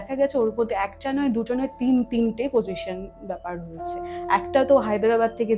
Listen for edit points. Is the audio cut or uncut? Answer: uncut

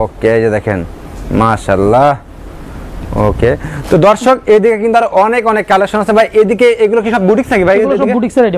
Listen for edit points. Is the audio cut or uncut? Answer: uncut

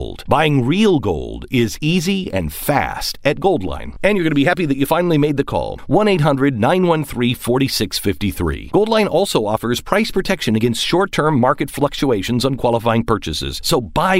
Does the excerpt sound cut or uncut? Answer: uncut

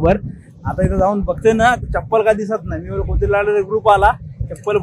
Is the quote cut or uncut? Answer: uncut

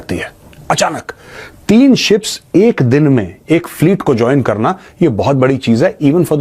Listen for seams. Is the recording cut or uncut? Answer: uncut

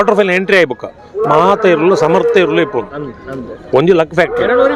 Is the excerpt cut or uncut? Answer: uncut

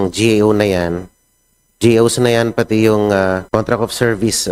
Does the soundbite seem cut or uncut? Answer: cut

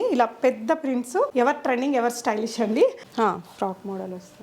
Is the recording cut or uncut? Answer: cut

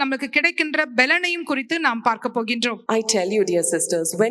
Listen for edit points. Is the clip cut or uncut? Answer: cut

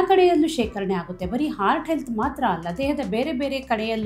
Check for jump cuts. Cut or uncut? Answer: uncut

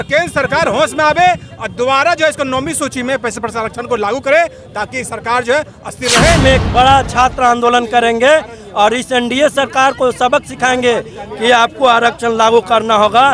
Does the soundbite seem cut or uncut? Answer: cut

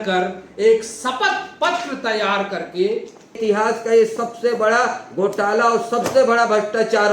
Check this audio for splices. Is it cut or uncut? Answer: cut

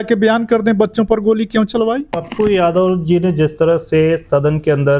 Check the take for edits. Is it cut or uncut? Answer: cut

